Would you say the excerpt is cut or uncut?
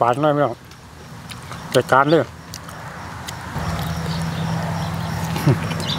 cut